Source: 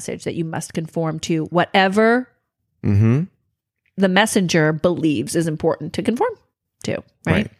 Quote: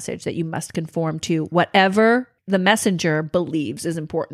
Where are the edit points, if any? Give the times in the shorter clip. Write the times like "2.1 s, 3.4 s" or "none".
2.3 s